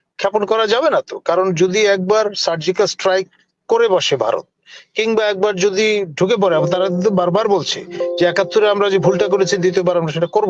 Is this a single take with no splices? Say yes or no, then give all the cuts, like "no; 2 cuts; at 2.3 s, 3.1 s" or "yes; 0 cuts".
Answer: yes; 0 cuts